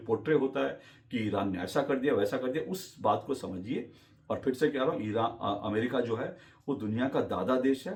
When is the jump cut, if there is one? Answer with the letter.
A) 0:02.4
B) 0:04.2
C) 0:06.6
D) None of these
D